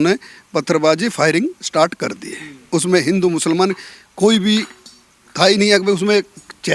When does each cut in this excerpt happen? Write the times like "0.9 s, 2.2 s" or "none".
none